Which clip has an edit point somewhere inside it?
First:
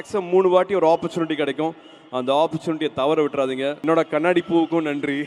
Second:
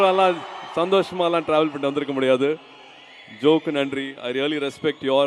first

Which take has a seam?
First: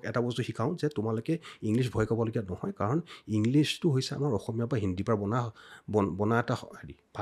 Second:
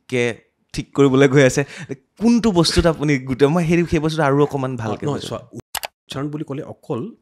second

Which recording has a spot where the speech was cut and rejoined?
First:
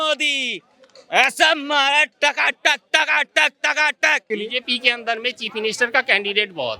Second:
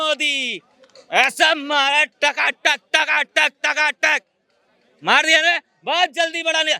first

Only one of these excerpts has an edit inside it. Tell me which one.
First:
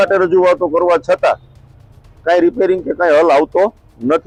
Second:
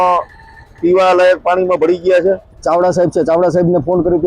second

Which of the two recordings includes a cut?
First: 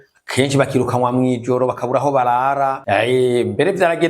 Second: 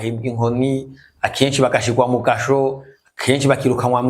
first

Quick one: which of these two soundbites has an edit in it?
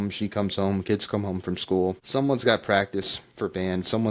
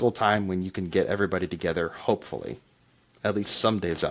first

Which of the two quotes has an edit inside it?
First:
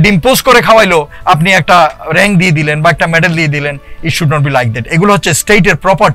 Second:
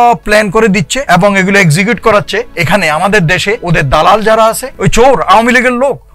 second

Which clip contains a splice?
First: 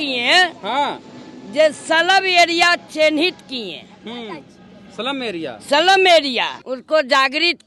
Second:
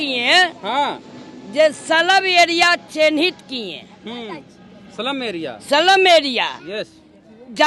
first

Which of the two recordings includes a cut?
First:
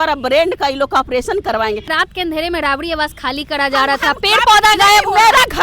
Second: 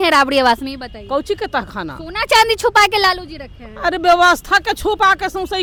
first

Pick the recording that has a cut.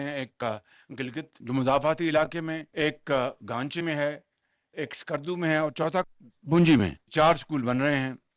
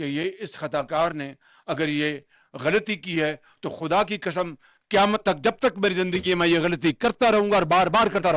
first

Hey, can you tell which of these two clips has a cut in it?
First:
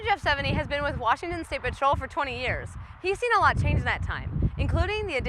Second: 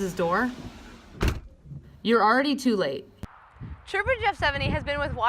second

